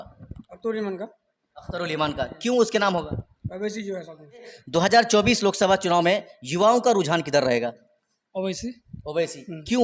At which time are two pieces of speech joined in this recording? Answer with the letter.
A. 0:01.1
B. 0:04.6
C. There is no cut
B